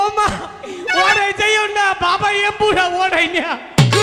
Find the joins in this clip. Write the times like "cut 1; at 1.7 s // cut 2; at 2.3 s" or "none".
none

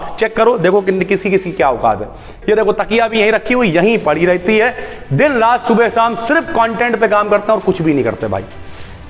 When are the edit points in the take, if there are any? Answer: cut 1; at 2.3 s

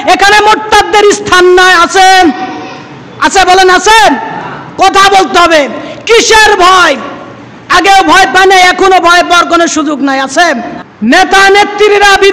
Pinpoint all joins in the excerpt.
cut 1; at 10.8 s

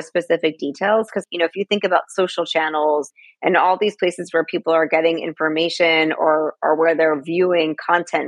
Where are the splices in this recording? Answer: cut 1; at 1.2 s // cut 2; at 3.1 s

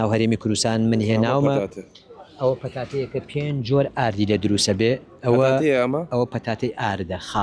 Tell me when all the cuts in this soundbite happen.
none

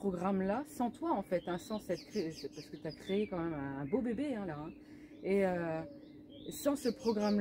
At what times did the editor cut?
none

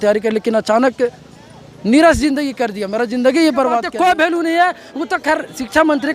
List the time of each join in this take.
cut 1; at 3.9 s

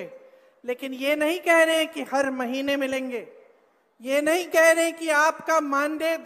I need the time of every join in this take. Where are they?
none

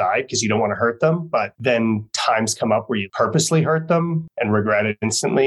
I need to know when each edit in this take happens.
cut 1; at 1.5 s // cut 2; at 3.1 s // cut 3; at 4.3 s

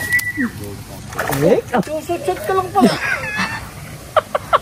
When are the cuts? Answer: cut 1; at 0.9 s // cut 2; at 1.9 s

